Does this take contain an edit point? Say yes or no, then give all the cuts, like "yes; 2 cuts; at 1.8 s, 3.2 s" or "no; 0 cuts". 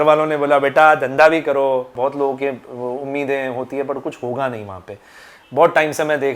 yes; 1 cut; at 1.9 s